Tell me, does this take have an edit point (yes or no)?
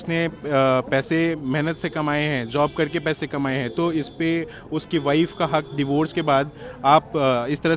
no